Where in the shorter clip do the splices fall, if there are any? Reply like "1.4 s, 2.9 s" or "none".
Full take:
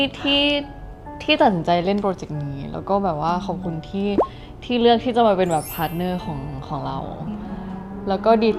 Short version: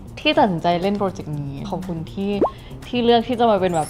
1.7 s

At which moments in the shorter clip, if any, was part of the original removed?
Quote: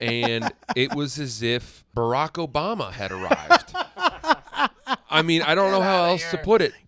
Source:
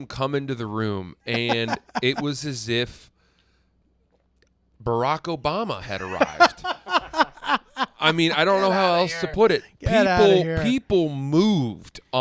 1.8 s

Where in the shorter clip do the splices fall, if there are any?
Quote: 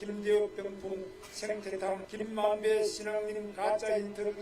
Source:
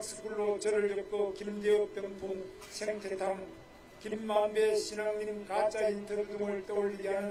2.1 s

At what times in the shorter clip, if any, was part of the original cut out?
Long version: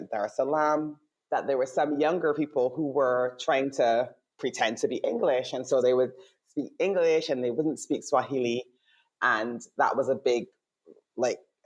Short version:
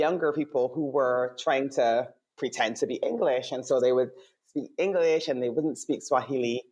none

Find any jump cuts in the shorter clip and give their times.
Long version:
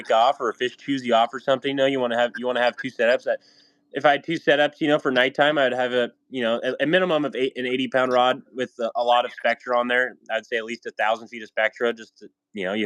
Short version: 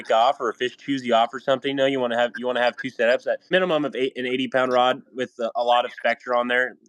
3.5 s

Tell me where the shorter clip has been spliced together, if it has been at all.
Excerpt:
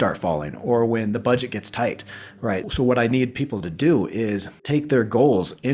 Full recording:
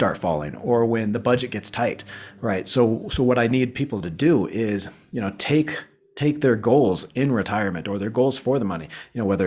2.7 s, 4.5 s

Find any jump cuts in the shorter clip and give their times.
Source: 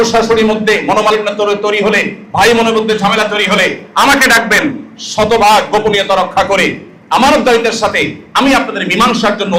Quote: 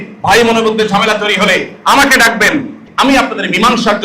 2.8 s

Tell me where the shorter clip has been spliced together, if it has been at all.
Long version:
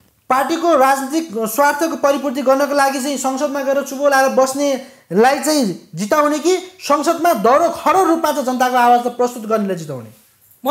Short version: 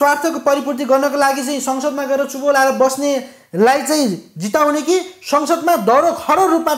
none

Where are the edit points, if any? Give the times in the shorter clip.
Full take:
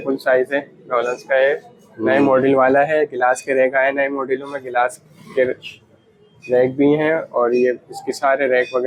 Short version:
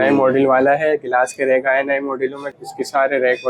2.6 s

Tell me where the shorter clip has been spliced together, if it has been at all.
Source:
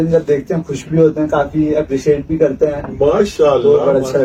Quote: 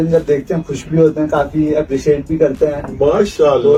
none

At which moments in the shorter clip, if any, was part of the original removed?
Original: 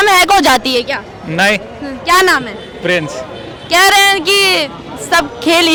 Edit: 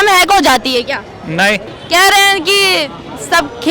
1.7 s

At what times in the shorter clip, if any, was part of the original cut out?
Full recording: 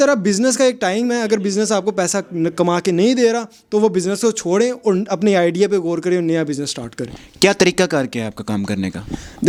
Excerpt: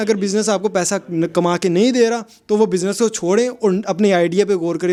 none

